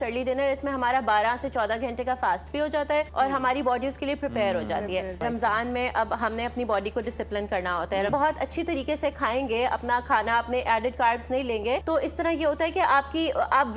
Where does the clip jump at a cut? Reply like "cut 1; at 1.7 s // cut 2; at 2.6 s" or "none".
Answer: cut 1; at 3.1 s // cut 2; at 5.2 s // cut 3; at 8.1 s // cut 4; at 11.8 s